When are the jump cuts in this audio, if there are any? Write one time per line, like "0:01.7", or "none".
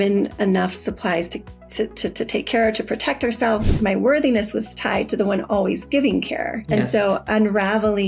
0:03.7
0:06.6